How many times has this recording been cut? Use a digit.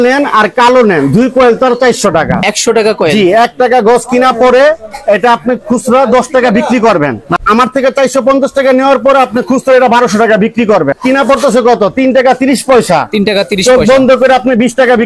3